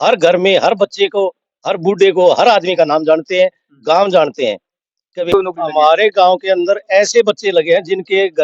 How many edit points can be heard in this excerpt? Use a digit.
1